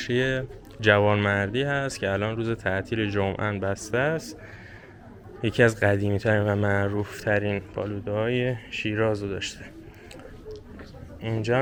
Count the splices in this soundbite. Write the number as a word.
zero